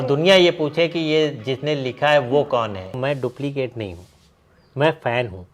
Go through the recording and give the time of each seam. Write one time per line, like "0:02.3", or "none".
0:03.0